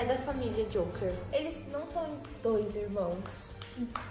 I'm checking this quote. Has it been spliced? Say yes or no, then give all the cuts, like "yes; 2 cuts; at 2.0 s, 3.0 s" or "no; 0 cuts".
yes; 1 cut; at 1.2 s